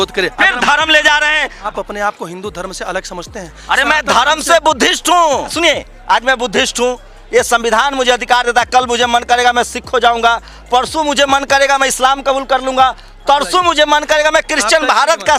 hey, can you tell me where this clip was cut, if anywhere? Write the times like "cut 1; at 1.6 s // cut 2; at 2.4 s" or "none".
none